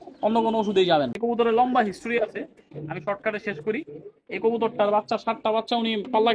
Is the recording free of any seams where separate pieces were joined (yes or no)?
no